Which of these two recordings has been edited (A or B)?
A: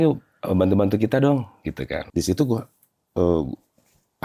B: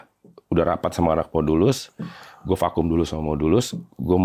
A